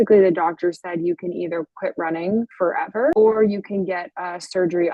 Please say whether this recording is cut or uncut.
cut